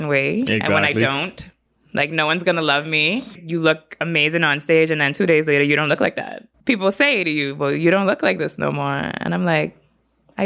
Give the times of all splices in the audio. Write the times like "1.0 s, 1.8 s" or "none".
3.3 s, 6.4 s